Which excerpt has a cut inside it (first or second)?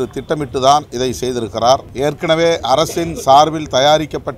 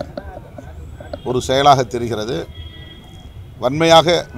first